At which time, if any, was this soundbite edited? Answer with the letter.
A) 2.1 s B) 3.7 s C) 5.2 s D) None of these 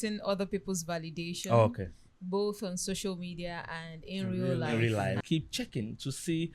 C